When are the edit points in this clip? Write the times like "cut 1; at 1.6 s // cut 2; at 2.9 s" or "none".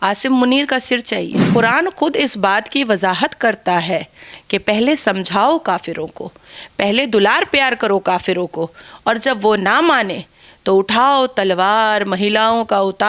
cut 1; at 1.4 s